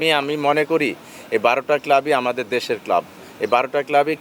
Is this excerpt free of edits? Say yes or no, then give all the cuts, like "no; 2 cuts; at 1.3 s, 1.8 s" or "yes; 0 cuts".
yes; 0 cuts